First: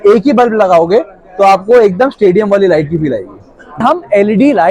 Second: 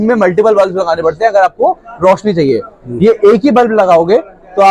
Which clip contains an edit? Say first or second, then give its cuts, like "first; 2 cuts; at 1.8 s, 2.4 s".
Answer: first; 1 cut; at 3.8 s